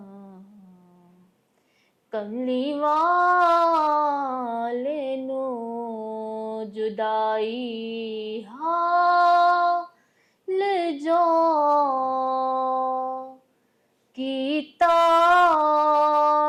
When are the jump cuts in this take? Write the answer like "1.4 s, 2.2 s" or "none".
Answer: none